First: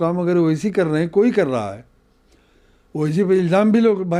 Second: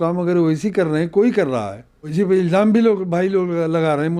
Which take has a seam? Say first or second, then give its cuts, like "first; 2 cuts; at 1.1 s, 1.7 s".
second; 1 cut; at 2.1 s